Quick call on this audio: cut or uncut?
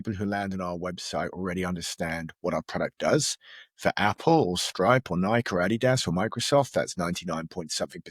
uncut